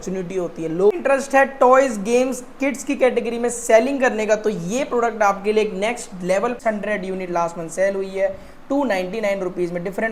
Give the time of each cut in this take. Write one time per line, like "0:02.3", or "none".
0:01.0
0:06.6